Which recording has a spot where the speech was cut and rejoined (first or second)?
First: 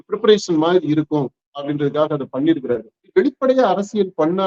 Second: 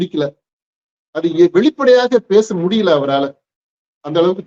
first